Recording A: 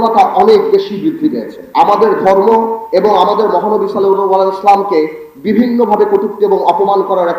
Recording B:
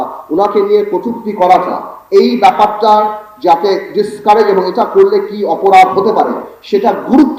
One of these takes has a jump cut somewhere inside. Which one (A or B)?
A